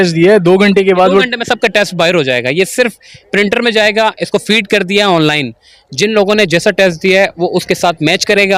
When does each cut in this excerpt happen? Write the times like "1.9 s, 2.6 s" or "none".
none

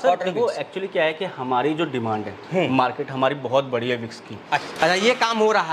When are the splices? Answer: 4.7 s

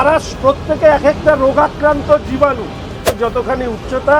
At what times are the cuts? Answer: 3.1 s

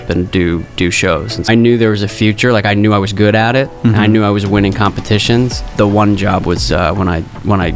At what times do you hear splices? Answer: 1.5 s, 5.7 s

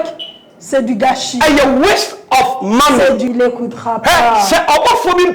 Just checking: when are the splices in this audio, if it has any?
3.3 s

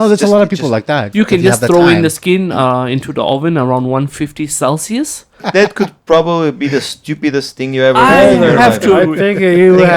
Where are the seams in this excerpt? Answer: 1.1 s, 5.4 s

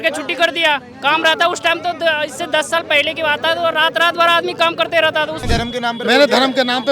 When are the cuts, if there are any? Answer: 5.4 s

